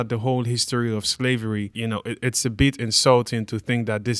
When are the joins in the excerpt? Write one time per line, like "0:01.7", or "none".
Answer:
0:01.7